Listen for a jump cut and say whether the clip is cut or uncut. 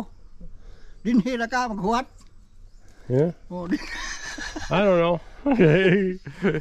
uncut